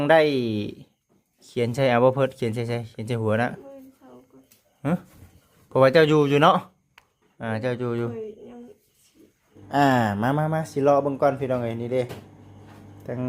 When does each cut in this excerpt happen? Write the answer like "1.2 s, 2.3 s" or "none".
9.6 s